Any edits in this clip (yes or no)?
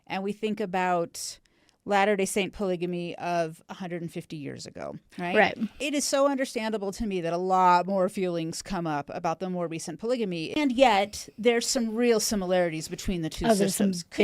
yes